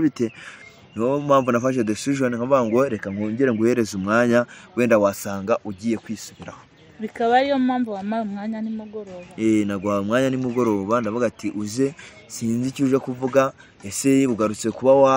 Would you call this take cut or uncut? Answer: uncut